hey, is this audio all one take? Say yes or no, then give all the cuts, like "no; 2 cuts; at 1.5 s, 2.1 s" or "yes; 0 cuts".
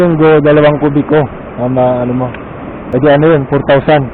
no; 1 cut; at 2.8 s